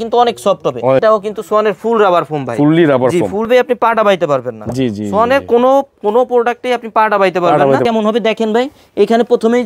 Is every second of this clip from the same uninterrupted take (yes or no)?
no